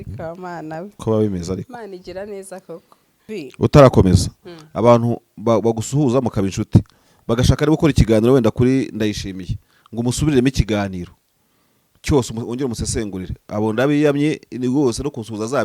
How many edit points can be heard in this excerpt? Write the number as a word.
one